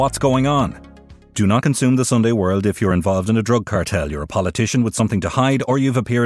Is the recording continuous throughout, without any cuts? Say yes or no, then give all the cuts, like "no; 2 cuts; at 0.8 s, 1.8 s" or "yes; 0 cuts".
yes; 0 cuts